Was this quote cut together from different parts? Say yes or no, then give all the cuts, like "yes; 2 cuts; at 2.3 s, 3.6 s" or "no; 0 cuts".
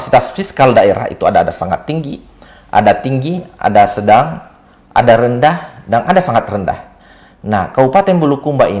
no; 0 cuts